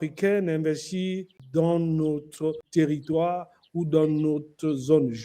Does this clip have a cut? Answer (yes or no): yes